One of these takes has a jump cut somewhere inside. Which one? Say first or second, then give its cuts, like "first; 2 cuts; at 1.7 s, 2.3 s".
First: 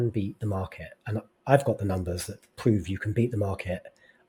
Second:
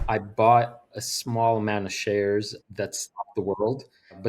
second; 2 cuts; at 1.0 s, 2.6 s